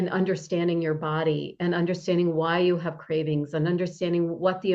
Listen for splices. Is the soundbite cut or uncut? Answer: uncut